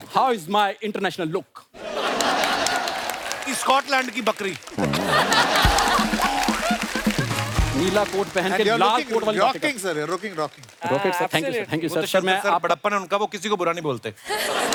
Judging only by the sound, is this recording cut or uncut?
uncut